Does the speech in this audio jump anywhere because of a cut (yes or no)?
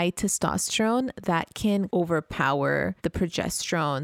yes